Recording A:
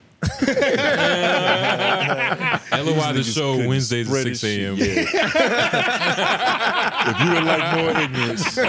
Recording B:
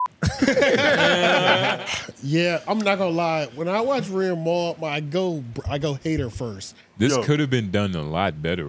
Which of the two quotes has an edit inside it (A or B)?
B